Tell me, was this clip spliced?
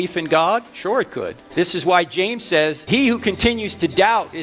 yes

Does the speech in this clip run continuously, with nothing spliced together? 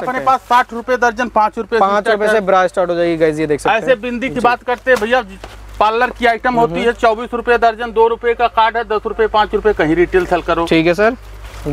yes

